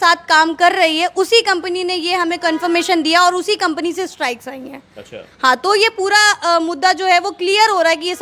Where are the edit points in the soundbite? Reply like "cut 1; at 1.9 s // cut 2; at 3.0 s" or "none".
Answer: none